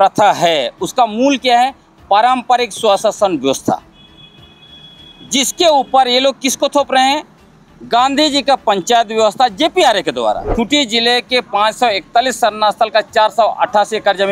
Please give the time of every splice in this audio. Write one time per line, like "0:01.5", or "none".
0:10.4